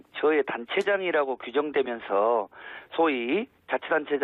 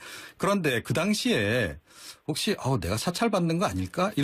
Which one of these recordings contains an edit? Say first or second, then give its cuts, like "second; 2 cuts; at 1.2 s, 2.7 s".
first; 1 cut; at 1.9 s